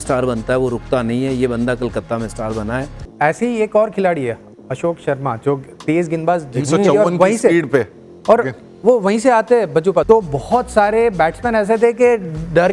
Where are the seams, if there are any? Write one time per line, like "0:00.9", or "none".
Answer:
0:03.0
0:10.0

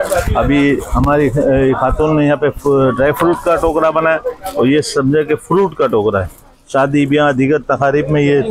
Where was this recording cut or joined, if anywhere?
none

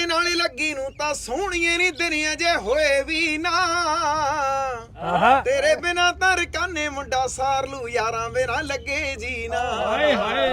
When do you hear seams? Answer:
none

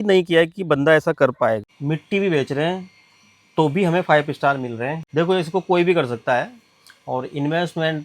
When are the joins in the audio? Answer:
0:01.7
0:05.0

